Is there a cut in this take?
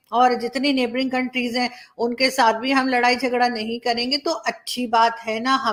no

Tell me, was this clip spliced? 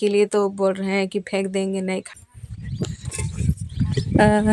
yes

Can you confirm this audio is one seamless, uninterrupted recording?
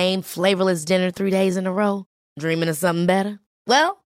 yes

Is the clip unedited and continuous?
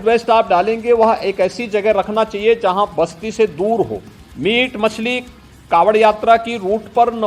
yes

